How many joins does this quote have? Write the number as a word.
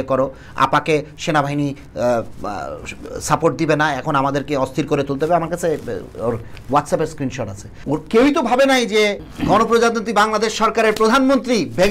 two